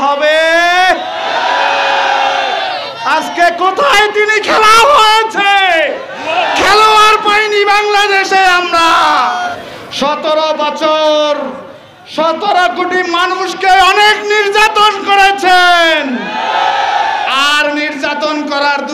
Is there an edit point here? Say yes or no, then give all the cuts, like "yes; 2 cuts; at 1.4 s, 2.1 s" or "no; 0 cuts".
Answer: yes; 1 cut; at 9.6 s